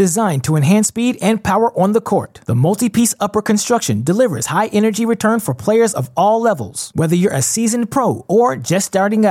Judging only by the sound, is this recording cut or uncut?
uncut